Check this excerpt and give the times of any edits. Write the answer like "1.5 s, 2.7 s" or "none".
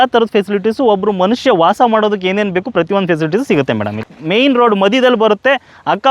4.0 s